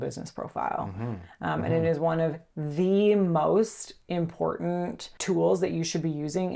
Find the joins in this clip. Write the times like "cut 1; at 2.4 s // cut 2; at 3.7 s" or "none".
none